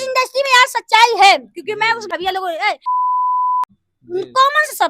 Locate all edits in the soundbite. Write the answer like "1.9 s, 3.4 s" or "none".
2.0 s